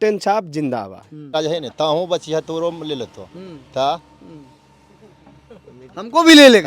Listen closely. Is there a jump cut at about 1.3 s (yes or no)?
yes